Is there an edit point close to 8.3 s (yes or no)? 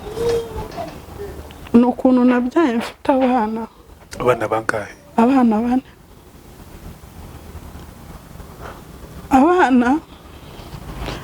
no